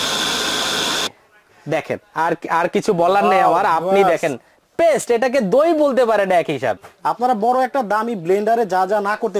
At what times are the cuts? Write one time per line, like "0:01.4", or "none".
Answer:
0:01.1
0:06.9